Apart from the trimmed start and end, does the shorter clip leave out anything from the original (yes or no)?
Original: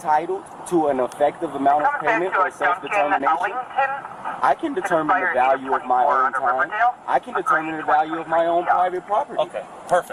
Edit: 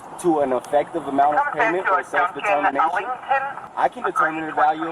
yes